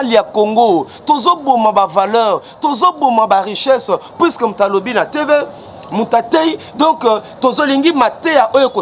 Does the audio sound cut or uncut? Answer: uncut